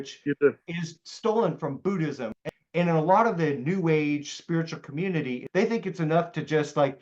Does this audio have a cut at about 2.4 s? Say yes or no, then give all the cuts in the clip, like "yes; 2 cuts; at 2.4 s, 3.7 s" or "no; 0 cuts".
yes; 2 cuts; at 2.4 s, 5.4 s